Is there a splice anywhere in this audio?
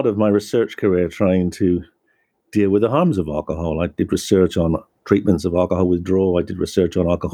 no; 0 cuts

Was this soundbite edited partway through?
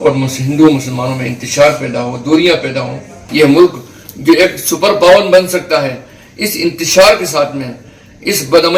yes; 1 cut; at 3.2 s

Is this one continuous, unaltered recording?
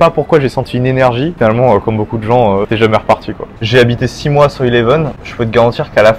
no; 2 cuts; at 1.3 s, 3.1 s

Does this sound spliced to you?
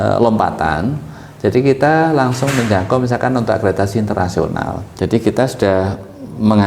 yes; 1 cut; at 4.8 s

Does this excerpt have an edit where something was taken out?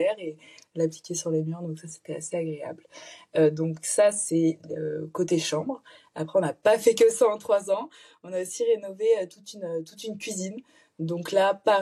no; 0 cuts

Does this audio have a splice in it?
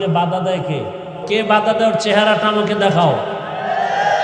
yes; 1 cut; at 1.3 s

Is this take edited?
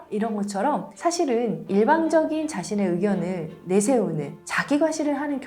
yes; 1 cut; at 0.9 s

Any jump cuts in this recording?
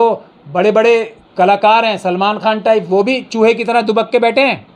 no; 0 cuts

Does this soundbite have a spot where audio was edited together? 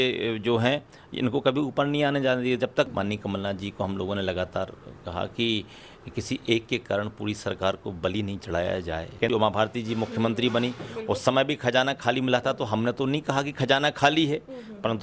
yes; 2 cuts; at 2.9 s, 9.2 s

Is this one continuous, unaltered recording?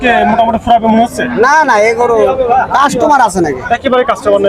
yes; 0 cuts

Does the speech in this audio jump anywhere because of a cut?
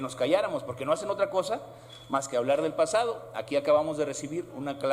no; 0 cuts

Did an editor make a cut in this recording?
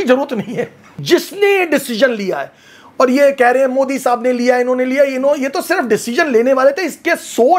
yes; 1 cut; at 1.0 s

